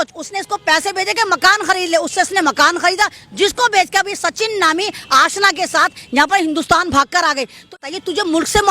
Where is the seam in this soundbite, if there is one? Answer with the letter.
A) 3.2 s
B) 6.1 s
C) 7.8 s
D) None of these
C